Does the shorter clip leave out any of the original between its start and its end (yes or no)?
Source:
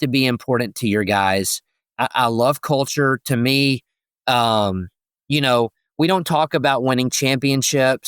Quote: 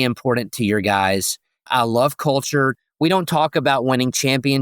yes